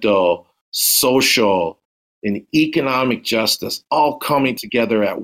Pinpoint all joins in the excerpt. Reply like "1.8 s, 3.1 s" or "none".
none